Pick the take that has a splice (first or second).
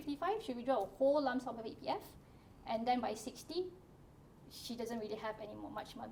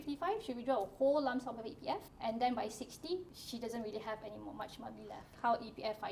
second